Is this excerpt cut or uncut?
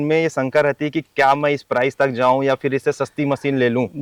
uncut